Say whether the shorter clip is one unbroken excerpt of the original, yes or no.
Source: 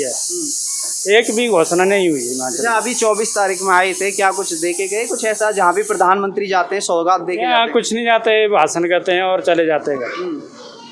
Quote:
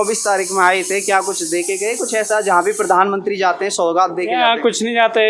yes